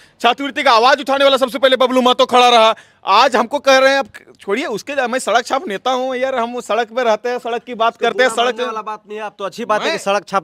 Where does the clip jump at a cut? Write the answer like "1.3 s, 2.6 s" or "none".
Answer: none